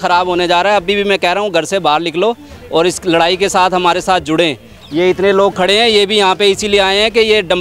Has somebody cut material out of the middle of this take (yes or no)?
no